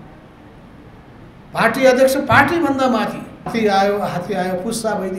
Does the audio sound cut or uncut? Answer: cut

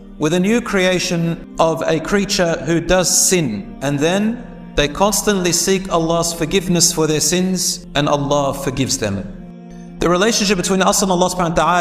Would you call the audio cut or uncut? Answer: cut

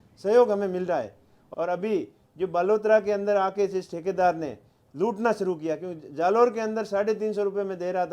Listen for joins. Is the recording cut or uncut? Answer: cut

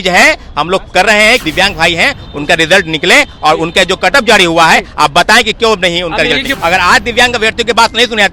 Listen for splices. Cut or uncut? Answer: cut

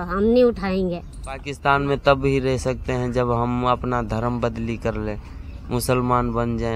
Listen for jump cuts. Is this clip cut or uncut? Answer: cut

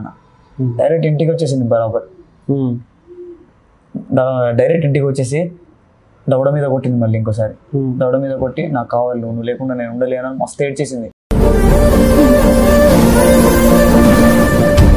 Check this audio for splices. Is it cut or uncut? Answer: uncut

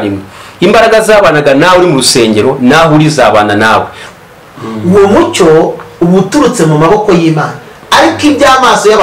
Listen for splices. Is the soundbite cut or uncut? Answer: cut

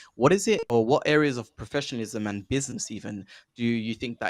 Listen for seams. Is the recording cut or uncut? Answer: uncut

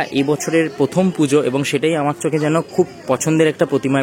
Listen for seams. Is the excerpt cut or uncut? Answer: uncut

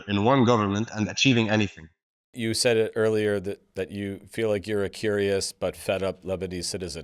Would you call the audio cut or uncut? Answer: cut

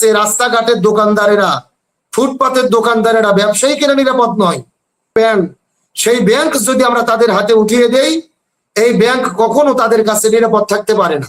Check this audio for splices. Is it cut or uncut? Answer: cut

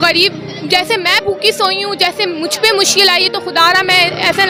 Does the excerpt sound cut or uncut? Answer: uncut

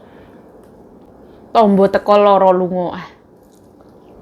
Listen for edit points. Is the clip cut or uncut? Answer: cut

